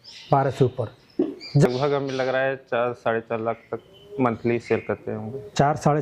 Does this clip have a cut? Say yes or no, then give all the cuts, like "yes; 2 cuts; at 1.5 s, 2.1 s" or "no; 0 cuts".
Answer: yes; 1 cut; at 1.7 s